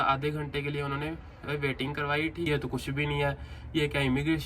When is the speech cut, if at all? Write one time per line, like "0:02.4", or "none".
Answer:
0:02.5